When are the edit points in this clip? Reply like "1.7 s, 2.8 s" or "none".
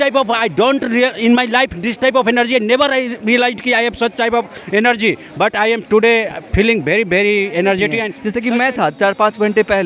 8.2 s